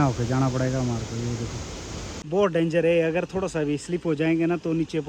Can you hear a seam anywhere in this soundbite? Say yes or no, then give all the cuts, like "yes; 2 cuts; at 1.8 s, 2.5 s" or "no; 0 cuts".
yes; 1 cut; at 2.2 s